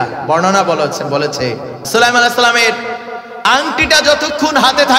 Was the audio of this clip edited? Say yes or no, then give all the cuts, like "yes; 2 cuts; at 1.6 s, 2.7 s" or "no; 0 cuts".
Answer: yes; 1 cut; at 1.7 s